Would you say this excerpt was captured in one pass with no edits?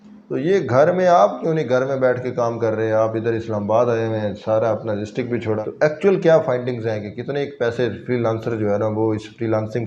no; 1 cut; at 5.6 s

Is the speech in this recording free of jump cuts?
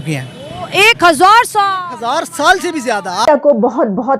no; 1 cut; at 3.3 s

